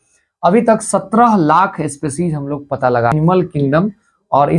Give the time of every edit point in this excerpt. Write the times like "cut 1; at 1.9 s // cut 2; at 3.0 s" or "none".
cut 1; at 3.1 s